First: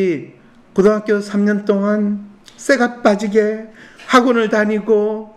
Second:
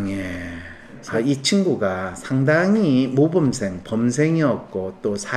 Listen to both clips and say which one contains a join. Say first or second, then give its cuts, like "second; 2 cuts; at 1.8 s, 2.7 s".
second; 1 cut; at 1.0 s